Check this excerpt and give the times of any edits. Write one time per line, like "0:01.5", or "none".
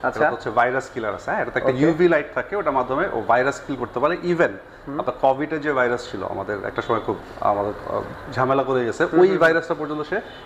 none